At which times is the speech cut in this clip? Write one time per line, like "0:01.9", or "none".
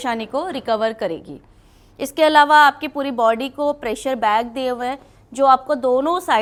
none